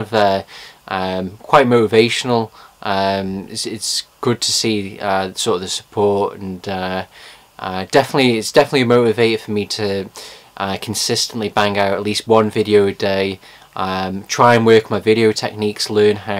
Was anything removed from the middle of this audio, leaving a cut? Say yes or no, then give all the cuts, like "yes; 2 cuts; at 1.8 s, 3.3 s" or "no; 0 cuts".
no; 0 cuts